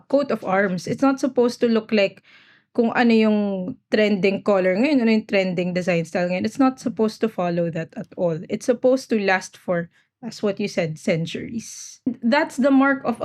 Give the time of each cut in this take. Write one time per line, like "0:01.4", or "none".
0:12.1